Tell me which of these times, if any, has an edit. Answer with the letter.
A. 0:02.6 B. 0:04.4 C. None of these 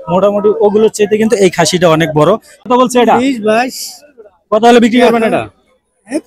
A